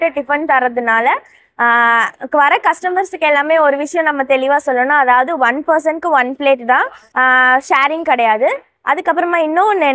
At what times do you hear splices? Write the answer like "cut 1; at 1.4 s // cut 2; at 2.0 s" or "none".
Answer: none